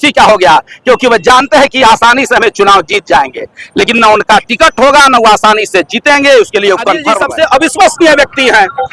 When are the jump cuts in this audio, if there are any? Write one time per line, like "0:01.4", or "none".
0:07.2